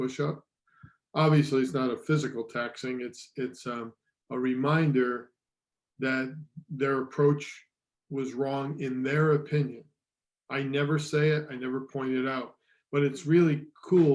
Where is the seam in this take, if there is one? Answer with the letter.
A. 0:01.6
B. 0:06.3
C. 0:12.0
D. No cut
D